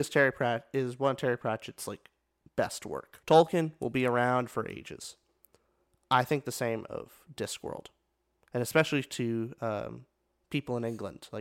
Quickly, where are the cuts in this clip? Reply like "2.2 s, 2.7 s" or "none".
3.1 s